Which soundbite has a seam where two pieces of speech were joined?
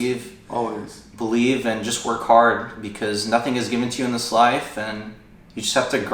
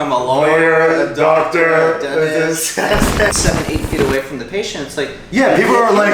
second; 1 cut; at 3.3 s

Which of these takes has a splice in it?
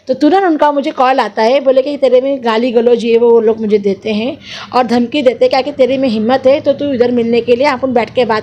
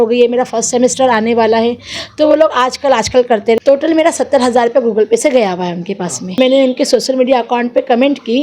second; 2 cuts; at 3.6 s, 6.4 s

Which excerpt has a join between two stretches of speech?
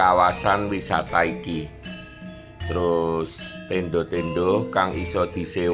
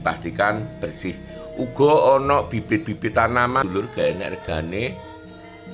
second; 1 cut; at 3.6 s

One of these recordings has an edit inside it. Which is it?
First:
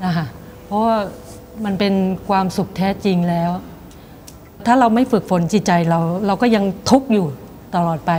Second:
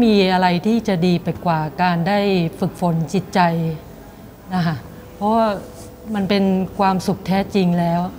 first; 1 cut; at 4.6 s

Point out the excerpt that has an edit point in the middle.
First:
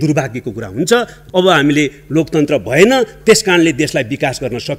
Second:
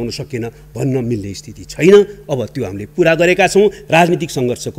first; 1 cut; at 1.2 s

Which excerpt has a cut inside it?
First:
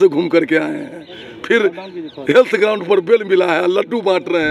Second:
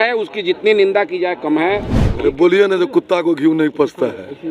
second; 1 cut; at 2.0 s

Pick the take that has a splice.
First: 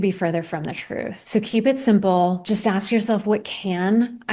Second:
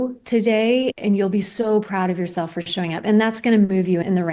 first; 2 cuts; at 1.2 s, 2.4 s

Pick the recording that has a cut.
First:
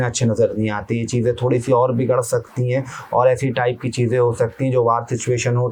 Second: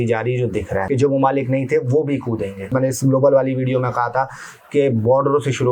second; 2 cuts; at 0.9 s, 2.7 s

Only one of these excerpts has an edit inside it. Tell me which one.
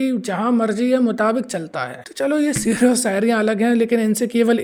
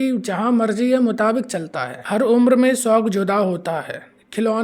second; 1 cut; at 2.0 s

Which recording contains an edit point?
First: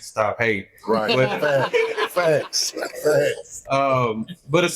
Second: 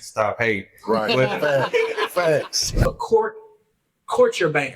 second; 1 cut; at 2.8 s

